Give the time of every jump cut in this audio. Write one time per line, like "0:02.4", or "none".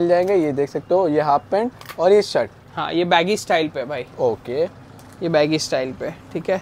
none